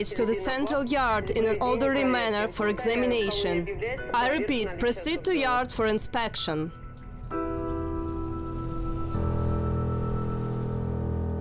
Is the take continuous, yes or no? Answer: no